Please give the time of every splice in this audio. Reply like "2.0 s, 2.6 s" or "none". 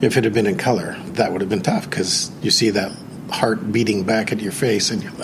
1.1 s